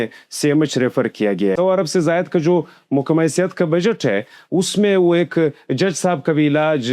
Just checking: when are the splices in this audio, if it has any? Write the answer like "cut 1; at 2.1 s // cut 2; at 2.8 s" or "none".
cut 1; at 1.5 s